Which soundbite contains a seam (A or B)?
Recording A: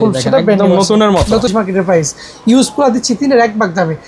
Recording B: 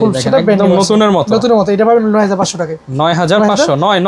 A